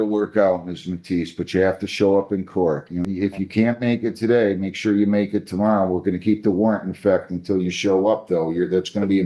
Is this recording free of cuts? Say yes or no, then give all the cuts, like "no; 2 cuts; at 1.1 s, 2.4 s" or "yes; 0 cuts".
no; 1 cut; at 3.0 s